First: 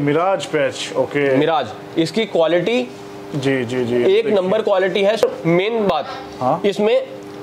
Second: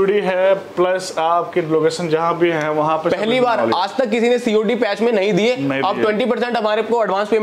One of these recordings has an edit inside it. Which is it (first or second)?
first